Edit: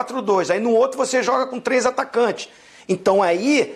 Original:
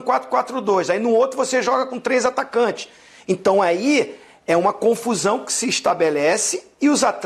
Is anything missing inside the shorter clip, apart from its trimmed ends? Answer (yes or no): no